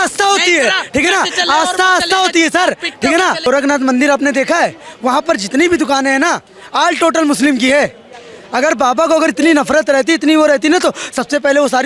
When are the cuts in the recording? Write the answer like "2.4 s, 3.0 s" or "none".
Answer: 3.5 s